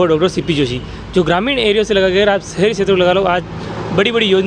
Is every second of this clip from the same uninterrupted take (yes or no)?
yes